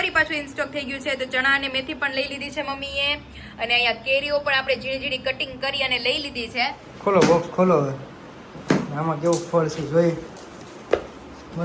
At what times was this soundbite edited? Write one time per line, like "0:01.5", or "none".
0:06.9